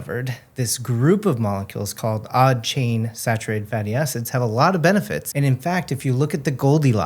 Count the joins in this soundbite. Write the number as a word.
two